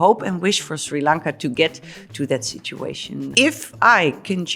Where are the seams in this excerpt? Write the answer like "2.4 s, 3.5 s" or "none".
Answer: 3.3 s